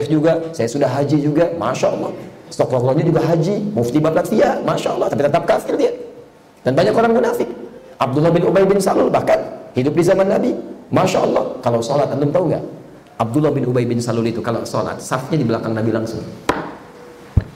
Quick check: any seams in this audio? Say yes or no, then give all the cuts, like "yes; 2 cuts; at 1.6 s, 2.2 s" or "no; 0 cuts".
no; 0 cuts